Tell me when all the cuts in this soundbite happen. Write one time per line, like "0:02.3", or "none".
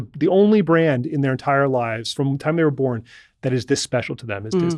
0:02.1